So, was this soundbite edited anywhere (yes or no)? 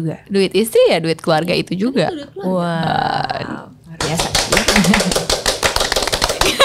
no